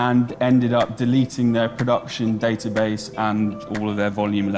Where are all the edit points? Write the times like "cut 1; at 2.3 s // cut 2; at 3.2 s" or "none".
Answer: none